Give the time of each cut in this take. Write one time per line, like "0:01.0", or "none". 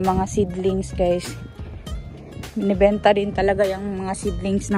none